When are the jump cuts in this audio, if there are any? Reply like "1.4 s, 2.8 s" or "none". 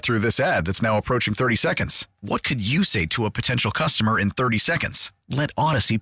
none